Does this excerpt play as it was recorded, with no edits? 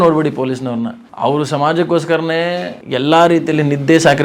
no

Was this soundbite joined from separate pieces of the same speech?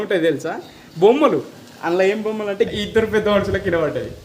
yes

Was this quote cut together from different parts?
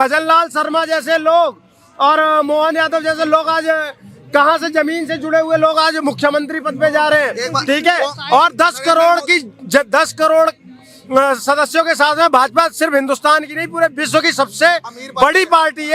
no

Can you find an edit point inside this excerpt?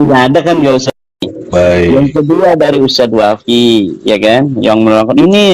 yes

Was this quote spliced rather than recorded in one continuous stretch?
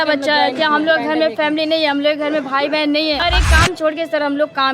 yes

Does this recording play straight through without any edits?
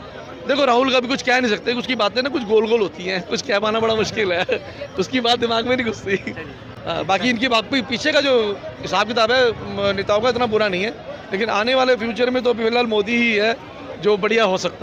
yes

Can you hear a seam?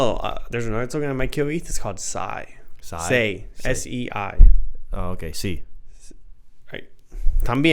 no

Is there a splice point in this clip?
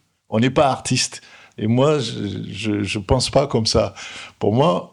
no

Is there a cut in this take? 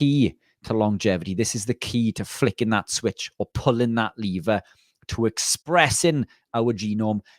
no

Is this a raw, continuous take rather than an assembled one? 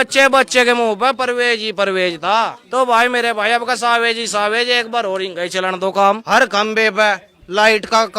no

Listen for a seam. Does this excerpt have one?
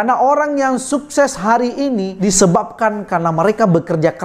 no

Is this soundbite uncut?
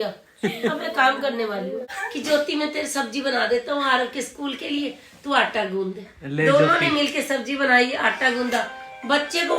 no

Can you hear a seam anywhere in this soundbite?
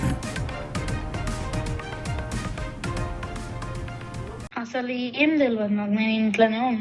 yes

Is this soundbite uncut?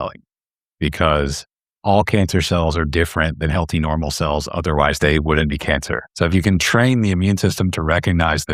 no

